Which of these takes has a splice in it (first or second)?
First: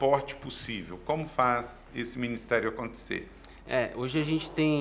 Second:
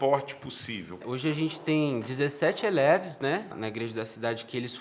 second